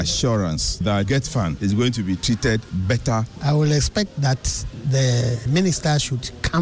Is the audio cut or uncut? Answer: cut